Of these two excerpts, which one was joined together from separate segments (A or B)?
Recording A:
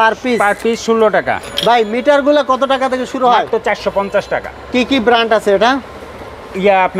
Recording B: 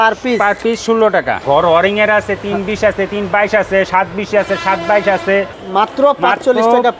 B